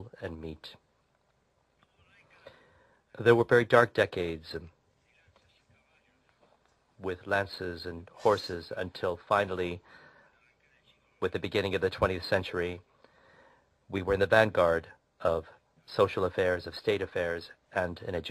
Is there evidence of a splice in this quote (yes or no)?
yes